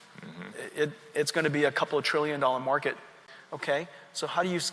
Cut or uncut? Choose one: cut